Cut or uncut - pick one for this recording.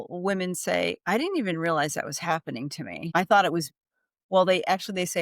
cut